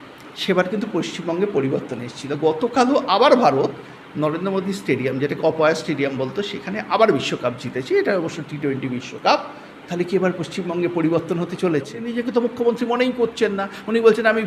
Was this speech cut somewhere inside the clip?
yes; 1 cut; at 12.0 s

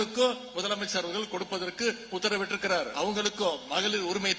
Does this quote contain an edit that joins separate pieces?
yes; 1 cut; at 2.9 s

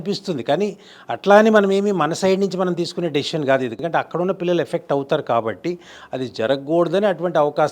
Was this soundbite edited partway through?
yes; 1 cut; at 3.8 s

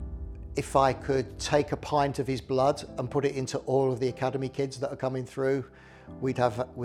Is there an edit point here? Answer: no; 0 cuts

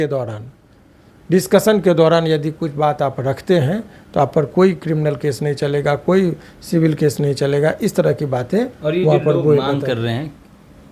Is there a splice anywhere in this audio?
no; 0 cuts

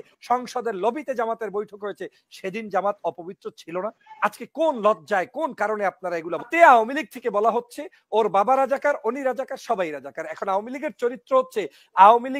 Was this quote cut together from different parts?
yes; 1 cut; at 6.5 s

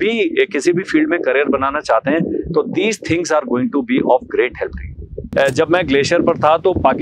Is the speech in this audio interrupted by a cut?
yes; 1 cut; at 5.3 s

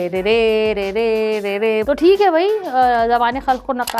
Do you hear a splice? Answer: yes; 1 cut; at 1.8 s

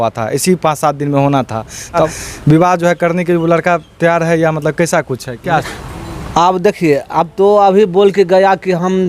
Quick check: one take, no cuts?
no; 2 cuts; at 2.1 s, 5.7 s

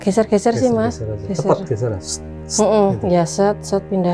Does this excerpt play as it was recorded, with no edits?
yes; 0 cuts

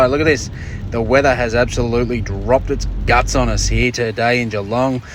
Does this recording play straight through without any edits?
yes; 0 cuts

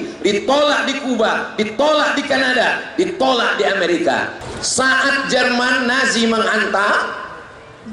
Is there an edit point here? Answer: yes; 1 cut; at 4.4 s

